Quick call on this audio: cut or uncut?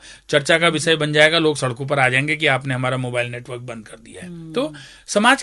uncut